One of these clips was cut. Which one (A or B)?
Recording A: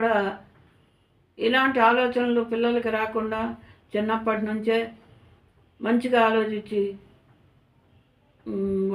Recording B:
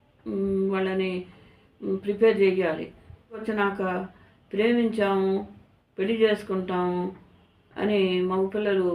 B